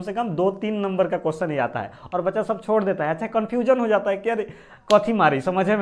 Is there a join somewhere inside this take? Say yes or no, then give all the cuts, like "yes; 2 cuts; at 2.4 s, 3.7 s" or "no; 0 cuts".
no; 0 cuts